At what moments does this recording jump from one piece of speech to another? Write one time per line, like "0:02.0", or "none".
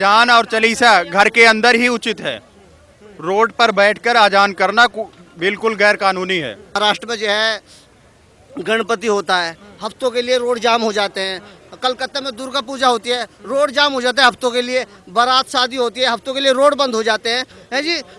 0:06.8